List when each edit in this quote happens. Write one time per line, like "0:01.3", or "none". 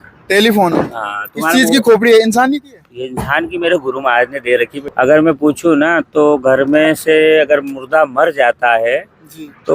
0:04.8